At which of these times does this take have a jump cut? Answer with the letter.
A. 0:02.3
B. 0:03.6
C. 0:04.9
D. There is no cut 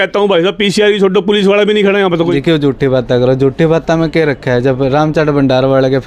A